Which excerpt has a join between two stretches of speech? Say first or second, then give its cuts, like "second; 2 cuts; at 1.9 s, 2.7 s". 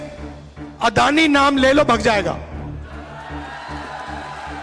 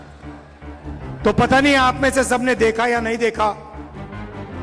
second; 2 cuts; at 1.2 s, 3.7 s